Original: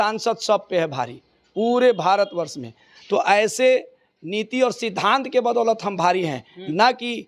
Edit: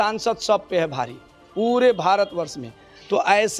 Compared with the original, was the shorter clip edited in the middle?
no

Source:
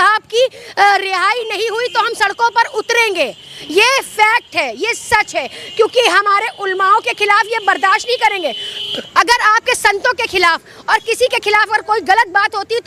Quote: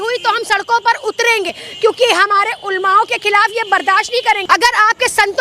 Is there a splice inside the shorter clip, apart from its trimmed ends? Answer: yes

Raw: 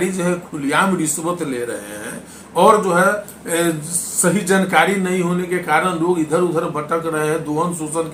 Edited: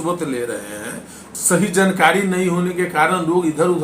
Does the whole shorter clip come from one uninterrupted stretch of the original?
no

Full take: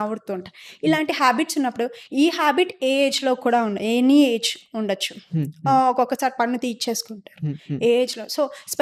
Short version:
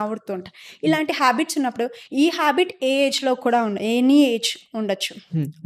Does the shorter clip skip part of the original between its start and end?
no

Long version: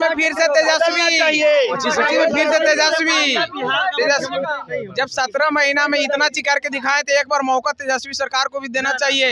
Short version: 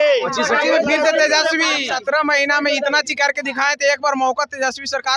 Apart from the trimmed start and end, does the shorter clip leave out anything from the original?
yes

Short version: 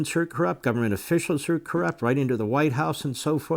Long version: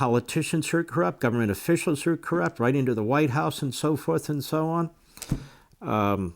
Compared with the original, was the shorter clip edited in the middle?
no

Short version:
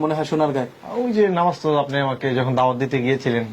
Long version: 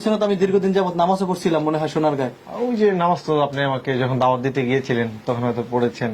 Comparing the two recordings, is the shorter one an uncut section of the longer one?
yes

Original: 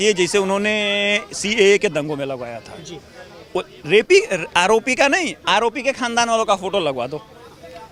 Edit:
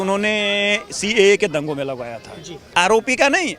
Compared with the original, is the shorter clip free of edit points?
no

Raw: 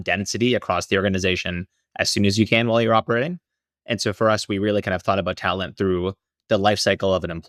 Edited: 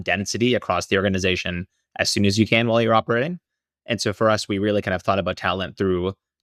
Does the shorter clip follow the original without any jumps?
yes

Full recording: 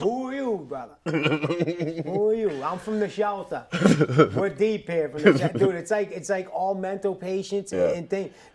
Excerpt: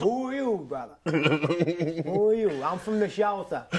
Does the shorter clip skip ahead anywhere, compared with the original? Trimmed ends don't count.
no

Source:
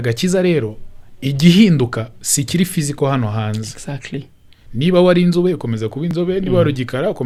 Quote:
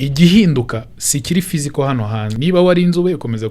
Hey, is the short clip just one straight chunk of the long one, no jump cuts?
no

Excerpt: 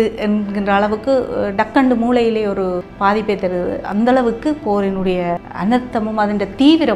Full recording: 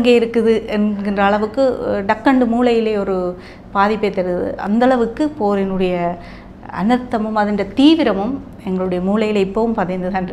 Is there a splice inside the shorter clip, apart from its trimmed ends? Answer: yes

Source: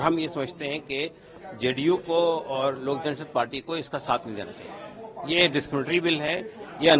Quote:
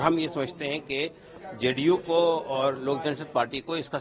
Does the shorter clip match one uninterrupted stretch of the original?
yes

